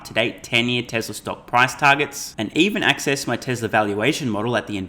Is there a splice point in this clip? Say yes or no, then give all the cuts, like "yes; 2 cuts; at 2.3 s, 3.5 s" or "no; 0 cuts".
no; 0 cuts